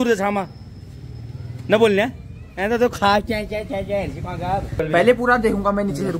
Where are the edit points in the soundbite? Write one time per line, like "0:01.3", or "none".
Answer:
0:04.8

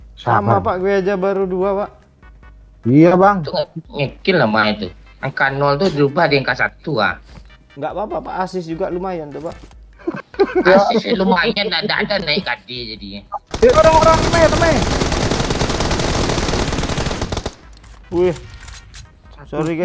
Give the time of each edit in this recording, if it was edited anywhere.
0:13.5

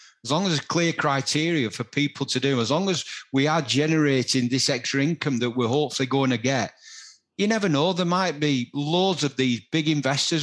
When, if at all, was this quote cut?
none

